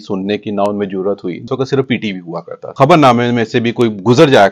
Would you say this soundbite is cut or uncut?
cut